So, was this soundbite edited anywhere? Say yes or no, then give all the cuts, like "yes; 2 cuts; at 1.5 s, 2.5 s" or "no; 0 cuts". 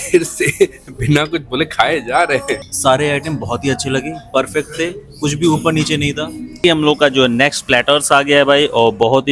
yes; 2 cuts; at 2.7 s, 6.6 s